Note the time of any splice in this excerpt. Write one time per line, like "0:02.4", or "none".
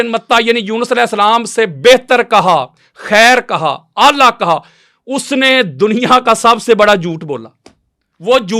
none